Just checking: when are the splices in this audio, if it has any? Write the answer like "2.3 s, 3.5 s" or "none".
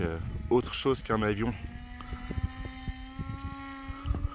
none